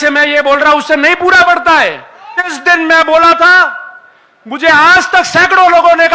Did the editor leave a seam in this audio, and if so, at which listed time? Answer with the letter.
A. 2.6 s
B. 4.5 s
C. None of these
A